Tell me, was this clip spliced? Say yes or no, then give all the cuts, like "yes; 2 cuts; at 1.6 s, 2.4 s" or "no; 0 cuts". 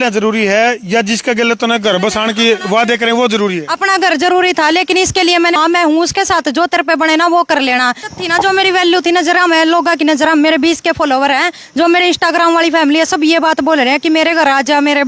yes; 2 cuts; at 5.6 s, 8.0 s